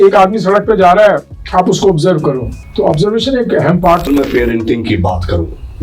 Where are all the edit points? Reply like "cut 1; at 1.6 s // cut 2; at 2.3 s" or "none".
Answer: cut 1; at 1.3 s // cut 2; at 2.6 s // cut 3; at 4.1 s